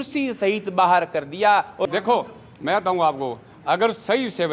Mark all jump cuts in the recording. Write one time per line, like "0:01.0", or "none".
0:01.9